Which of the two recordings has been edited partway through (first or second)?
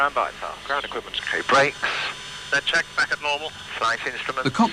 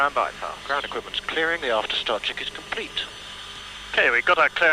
second